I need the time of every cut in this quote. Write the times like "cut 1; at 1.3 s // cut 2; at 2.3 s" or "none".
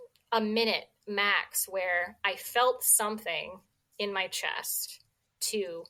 none